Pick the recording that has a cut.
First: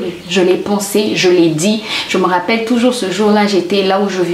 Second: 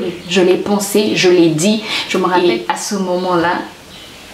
second; 1 cut; at 2.4 s

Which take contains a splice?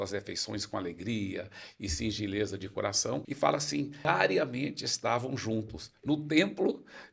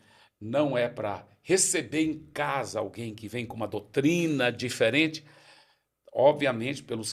first; 2 cuts; at 3.3 s, 4.1 s

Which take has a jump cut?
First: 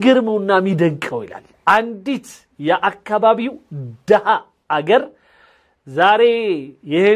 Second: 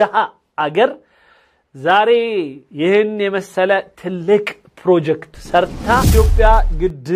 second; 1 cut; at 6.1 s

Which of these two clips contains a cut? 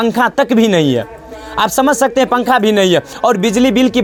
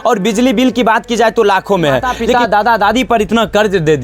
second; 1 cut; at 2.2 s

